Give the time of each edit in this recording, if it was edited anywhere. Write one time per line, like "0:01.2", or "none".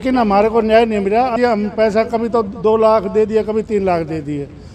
0:01.4